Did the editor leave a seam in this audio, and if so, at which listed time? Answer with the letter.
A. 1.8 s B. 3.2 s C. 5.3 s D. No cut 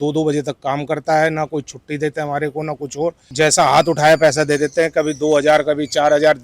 B